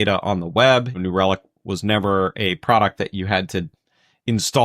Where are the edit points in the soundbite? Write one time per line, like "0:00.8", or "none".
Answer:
0:00.9